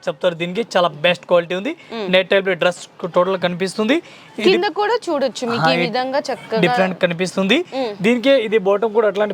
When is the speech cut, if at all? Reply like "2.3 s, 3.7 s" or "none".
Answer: none